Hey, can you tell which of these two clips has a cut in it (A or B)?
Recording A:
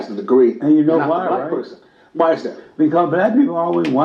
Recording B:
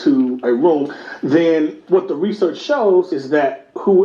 B